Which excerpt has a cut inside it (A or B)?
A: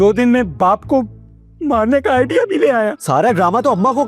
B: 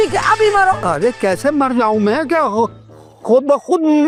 A